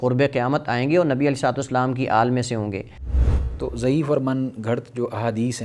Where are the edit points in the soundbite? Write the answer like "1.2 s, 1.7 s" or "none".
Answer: 3.1 s